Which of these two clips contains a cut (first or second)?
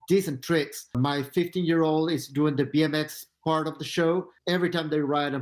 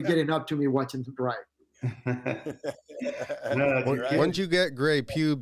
first